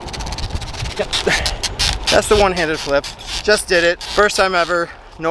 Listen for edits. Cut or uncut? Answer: cut